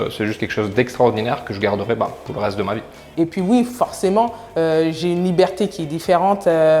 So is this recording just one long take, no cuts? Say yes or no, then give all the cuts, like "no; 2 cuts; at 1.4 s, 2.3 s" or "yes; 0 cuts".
yes; 0 cuts